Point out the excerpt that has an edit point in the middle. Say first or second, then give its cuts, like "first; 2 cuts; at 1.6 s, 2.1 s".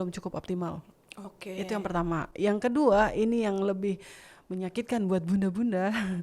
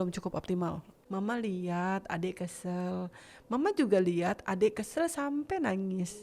second; 1 cut; at 0.9 s